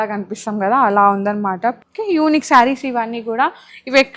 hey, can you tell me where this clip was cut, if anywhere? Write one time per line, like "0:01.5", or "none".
0:01.9